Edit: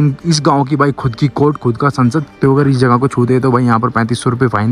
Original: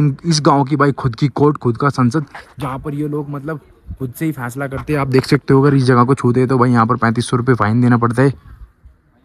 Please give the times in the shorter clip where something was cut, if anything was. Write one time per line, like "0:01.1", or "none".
0:02.4